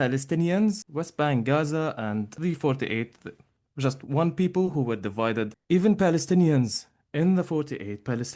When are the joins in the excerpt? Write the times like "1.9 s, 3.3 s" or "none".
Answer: 0.9 s, 2.3 s, 5.6 s